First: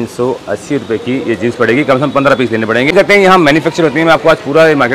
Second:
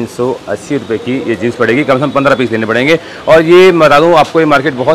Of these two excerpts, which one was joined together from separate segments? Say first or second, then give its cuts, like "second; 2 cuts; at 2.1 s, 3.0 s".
first; 1 cut; at 2.9 s